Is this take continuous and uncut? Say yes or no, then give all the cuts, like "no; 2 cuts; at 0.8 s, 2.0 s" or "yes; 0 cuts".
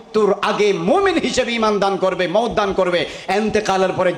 yes; 0 cuts